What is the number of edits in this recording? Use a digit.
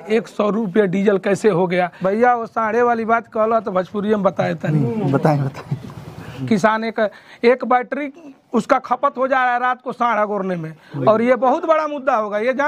2